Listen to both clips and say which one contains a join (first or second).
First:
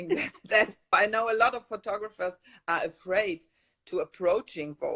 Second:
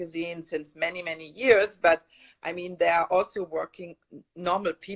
first